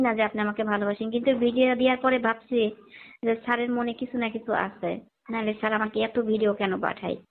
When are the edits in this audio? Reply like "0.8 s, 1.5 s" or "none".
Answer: none